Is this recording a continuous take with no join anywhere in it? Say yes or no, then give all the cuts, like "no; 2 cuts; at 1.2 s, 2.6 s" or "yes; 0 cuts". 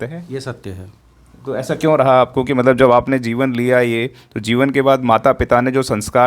yes; 0 cuts